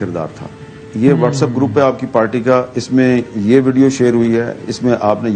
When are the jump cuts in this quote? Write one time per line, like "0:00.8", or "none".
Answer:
none